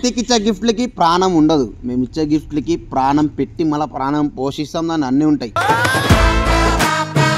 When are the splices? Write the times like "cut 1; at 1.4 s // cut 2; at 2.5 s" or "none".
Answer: none